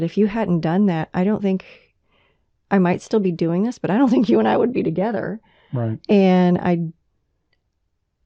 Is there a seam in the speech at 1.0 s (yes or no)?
no